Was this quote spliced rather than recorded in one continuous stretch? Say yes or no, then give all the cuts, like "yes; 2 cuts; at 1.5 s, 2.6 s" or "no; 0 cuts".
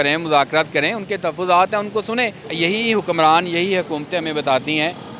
yes; 1 cut; at 2.4 s